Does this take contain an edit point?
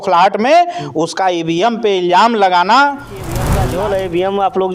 yes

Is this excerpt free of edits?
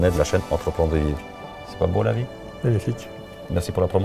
yes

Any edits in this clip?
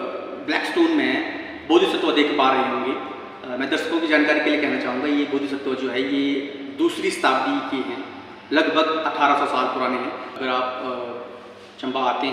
yes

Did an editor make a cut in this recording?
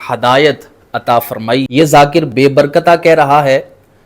yes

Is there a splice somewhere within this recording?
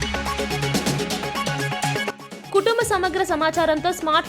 yes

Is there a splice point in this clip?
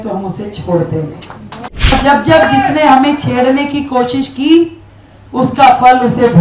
yes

